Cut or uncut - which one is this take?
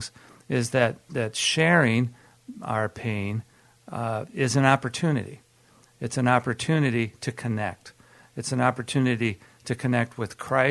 uncut